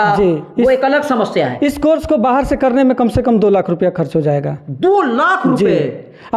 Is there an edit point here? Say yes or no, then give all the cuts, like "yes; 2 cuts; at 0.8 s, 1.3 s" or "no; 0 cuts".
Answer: no; 0 cuts